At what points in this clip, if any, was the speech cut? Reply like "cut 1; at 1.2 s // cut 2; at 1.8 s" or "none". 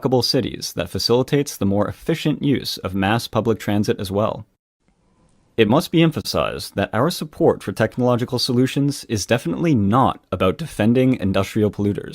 cut 1; at 3.4 s

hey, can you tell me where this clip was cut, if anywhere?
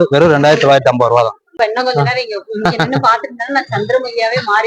cut 1; at 1.5 s

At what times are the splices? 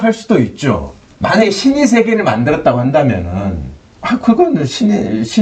cut 1; at 1.0 s

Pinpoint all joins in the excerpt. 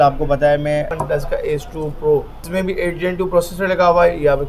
cut 1; at 0.9 s // cut 2; at 2.4 s

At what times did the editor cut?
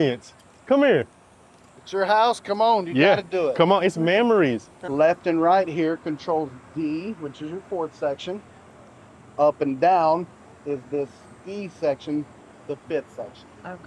cut 1; at 4.7 s

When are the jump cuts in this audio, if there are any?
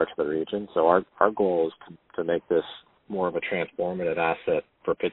none

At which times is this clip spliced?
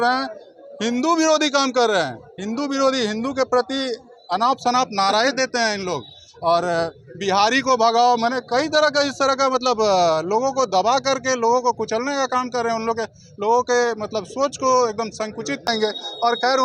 none

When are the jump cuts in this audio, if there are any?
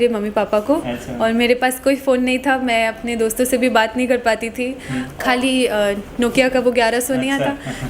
cut 1; at 5.1 s

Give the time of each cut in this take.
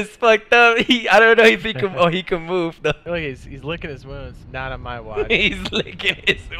cut 1; at 3.0 s

